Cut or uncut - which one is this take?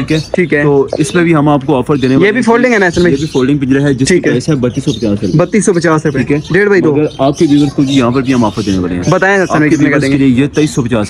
uncut